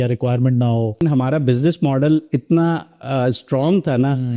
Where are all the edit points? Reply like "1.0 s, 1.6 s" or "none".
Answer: 1.0 s